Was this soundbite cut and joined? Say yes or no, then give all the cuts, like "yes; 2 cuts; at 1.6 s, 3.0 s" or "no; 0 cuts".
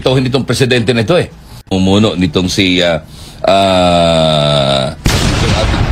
yes; 1 cut; at 1.7 s